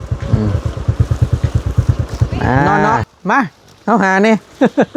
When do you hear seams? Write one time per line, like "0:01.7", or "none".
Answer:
0:02.7